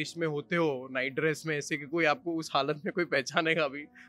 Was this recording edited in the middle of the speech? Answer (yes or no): no